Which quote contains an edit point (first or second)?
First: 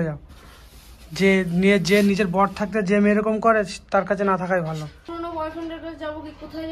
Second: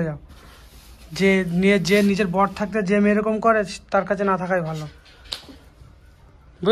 first